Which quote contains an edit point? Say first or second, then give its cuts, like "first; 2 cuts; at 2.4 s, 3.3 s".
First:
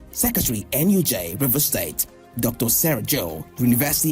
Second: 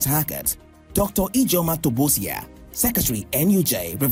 first; 1 cut; at 2.9 s